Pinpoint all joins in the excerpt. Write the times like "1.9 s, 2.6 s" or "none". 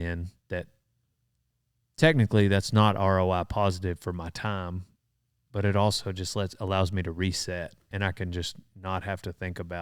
7.9 s